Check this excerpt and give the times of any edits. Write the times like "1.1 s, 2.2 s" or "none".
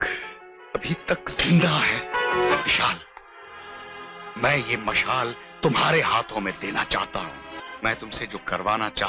2.6 s, 7.6 s